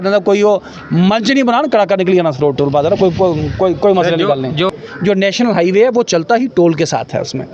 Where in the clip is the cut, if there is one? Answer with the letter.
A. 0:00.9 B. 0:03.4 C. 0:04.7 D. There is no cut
C